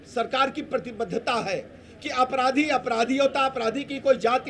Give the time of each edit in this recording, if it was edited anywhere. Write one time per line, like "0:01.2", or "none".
none